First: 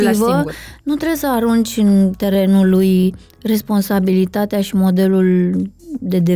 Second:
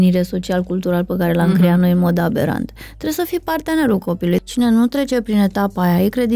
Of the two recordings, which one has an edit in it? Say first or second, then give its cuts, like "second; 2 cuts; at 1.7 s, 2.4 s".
second; 1 cut; at 4.4 s